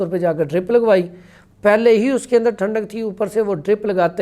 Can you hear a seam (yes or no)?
no